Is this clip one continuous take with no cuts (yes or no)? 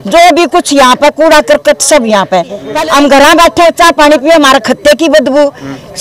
no